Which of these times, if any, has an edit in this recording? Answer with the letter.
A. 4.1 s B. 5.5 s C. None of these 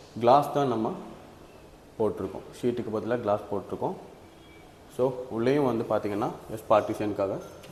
C